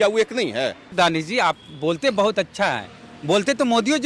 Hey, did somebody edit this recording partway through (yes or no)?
yes